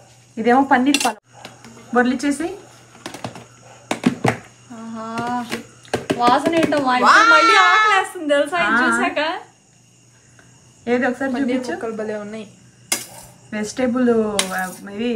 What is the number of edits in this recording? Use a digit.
1